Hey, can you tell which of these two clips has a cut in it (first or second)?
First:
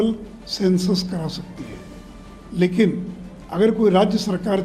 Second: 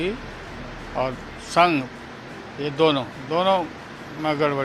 second